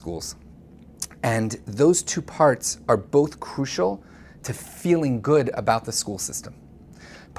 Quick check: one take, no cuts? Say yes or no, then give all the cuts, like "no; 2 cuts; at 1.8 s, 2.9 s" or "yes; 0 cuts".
no; 1 cut; at 2.7 s